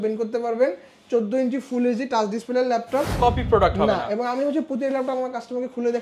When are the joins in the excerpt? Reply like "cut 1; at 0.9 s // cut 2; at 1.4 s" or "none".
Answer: cut 1; at 3.2 s